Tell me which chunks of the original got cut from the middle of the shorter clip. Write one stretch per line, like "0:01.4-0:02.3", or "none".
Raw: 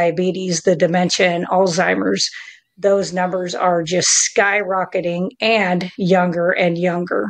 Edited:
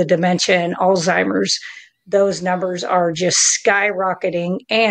none